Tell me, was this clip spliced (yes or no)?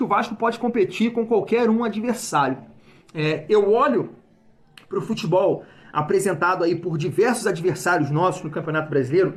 no